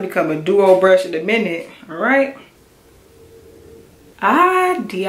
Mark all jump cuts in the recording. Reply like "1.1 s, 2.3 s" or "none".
4.1 s